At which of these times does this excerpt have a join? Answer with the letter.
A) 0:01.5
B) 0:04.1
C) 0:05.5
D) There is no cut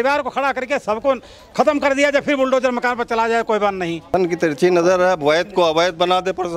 B